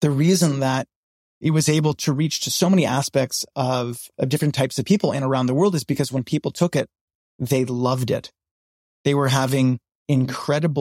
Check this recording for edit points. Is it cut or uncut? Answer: cut